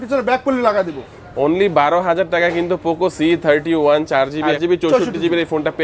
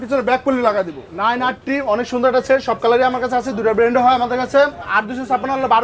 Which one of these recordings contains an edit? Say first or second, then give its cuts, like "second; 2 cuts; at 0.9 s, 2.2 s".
second; 2 cuts; at 1.0 s, 4.9 s